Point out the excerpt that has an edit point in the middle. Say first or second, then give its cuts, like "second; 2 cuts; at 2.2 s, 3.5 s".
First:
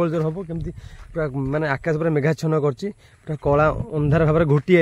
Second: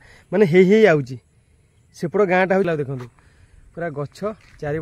second; 1 cut; at 2.7 s